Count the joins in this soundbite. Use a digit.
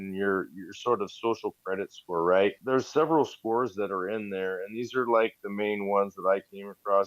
1